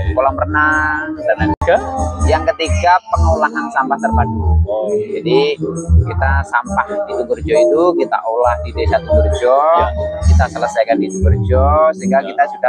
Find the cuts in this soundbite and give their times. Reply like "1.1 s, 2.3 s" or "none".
1.6 s